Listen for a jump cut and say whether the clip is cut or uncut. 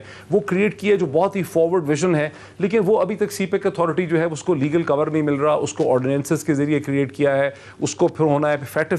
uncut